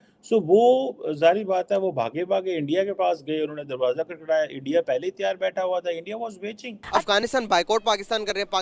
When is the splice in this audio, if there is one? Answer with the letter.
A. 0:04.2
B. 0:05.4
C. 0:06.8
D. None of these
C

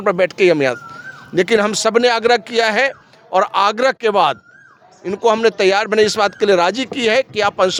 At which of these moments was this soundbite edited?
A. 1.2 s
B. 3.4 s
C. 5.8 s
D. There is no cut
D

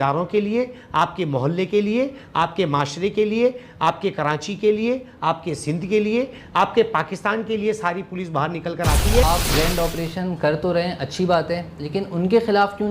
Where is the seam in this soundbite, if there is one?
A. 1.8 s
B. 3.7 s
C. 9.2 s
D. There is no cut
C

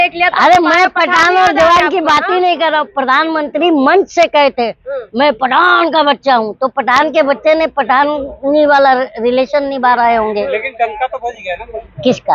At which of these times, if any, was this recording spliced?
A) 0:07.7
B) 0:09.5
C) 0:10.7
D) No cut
D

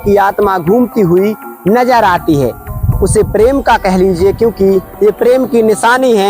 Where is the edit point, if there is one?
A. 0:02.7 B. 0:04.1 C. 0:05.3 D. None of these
A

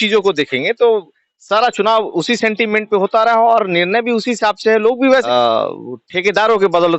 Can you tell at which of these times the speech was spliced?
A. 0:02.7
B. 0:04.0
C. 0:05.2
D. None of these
C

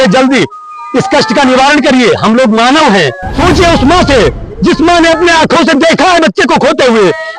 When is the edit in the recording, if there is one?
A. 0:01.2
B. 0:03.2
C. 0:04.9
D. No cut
B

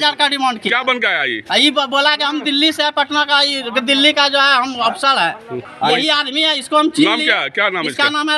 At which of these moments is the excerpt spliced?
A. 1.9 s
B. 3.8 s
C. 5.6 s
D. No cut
C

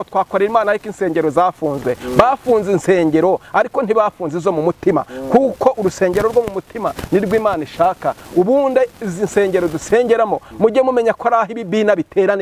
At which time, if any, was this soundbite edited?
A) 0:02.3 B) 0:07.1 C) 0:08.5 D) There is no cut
D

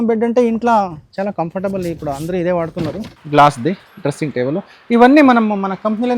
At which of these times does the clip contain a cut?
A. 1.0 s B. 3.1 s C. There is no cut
B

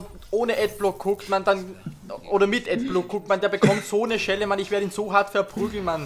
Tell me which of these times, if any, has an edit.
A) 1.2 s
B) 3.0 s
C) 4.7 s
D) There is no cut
D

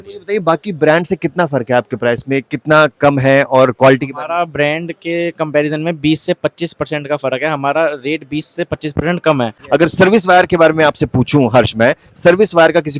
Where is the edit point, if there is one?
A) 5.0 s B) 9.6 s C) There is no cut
B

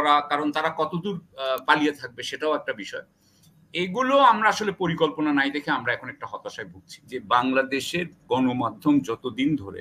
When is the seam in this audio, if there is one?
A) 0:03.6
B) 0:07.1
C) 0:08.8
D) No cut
B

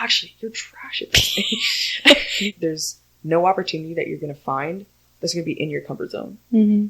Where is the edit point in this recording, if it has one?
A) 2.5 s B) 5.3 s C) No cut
A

